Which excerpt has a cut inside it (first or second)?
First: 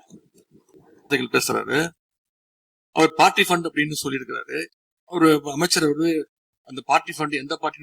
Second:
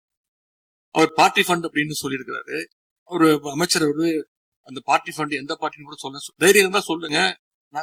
first